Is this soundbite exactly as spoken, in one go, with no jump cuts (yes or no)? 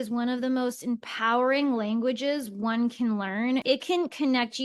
no